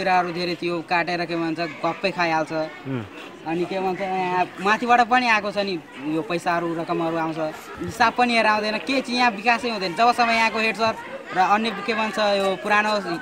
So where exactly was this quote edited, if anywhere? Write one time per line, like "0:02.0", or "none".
0:07.7